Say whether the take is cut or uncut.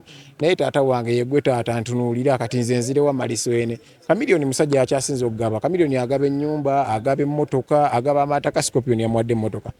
uncut